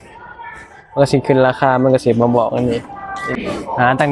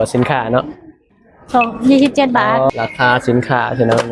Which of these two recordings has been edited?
second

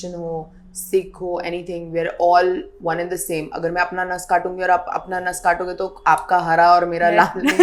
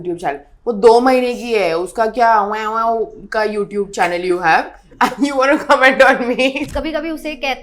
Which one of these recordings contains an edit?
second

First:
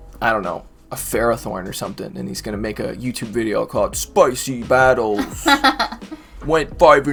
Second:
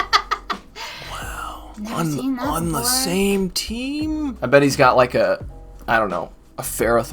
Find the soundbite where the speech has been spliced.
second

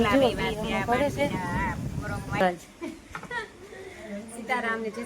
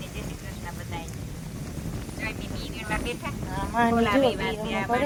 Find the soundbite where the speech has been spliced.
first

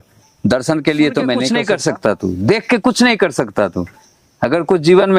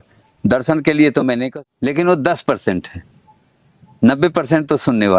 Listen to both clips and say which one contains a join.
first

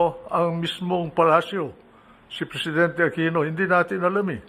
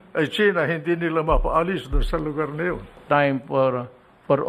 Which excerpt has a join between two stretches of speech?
second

